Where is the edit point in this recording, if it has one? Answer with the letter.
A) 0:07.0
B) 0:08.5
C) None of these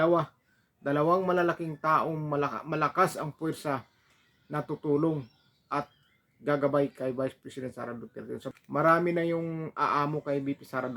B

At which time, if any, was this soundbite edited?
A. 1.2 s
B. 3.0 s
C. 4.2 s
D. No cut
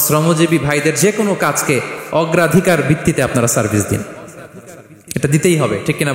D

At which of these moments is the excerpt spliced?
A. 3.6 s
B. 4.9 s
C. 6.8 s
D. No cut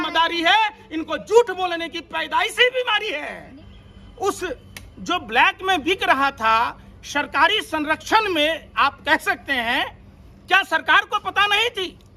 A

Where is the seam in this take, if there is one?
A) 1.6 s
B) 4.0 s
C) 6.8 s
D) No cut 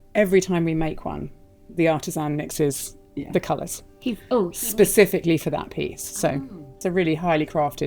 C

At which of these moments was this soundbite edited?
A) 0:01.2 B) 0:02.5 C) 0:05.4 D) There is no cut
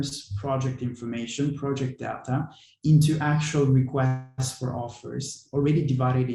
D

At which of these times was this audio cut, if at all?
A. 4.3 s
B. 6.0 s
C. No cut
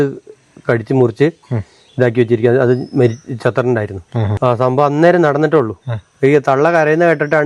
A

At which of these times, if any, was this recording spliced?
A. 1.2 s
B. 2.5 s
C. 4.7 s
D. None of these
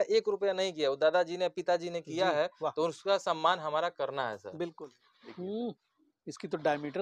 C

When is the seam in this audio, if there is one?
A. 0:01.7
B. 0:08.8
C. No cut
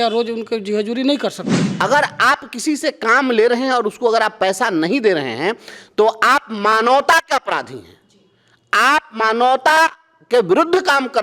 A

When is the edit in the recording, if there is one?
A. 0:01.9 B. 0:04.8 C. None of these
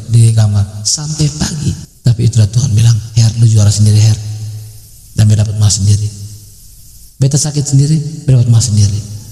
A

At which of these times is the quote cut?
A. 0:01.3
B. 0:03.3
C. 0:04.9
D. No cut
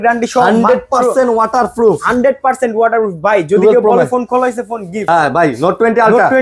C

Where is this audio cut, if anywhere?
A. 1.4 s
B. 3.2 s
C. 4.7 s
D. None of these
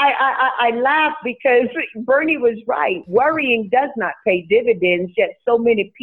D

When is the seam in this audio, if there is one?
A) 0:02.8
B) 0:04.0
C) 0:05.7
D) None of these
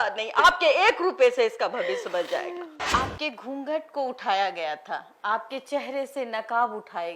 A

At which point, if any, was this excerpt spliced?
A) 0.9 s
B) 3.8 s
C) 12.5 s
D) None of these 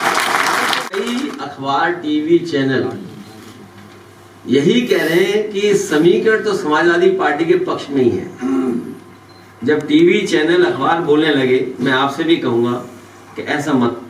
A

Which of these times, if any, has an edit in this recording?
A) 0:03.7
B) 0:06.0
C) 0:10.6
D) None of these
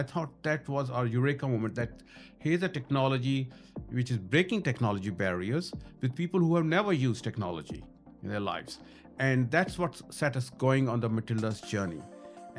D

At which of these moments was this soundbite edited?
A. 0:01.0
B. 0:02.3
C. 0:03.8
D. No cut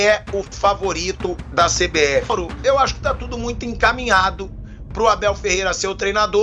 B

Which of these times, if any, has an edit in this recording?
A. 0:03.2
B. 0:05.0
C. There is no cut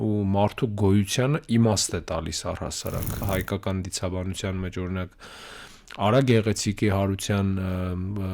A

